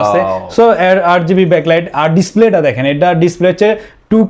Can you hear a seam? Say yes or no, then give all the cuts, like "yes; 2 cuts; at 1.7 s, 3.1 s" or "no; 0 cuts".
no; 0 cuts